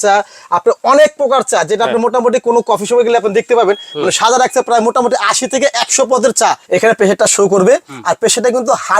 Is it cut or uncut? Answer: cut